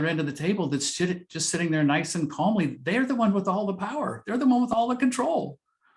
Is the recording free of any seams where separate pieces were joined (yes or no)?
yes